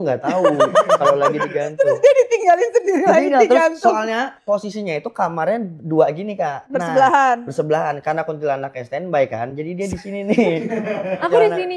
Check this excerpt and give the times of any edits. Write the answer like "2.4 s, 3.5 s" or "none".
none